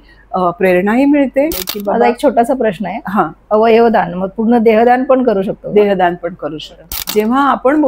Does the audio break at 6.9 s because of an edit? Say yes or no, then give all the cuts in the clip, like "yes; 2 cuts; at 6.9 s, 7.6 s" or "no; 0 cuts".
yes; 2 cuts; at 1.7 s, 6.9 s